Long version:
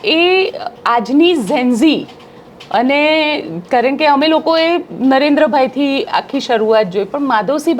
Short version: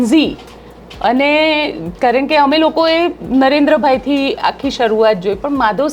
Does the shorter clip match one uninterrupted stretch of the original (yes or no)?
yes